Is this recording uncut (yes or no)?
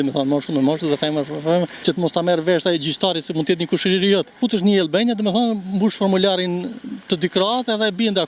no